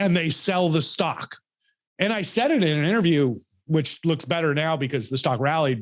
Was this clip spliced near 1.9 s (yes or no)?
no